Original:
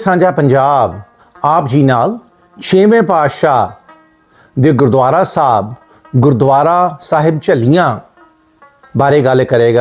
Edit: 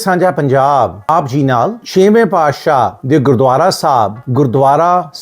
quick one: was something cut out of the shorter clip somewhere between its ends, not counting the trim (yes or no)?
yes